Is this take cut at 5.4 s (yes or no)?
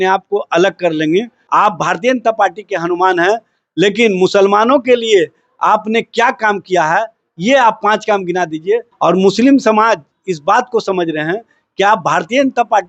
no